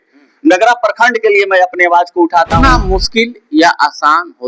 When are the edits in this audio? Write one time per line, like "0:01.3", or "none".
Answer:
0:02.5